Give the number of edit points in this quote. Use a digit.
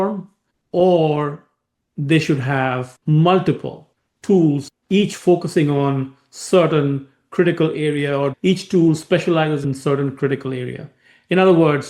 2